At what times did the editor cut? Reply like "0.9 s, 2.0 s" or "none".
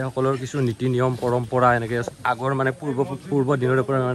none